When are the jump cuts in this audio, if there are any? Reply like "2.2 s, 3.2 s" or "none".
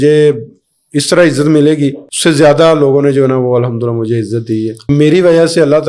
2.1 s, 4.9 s